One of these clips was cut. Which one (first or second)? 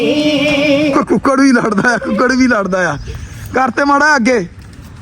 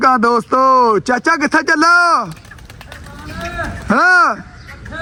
first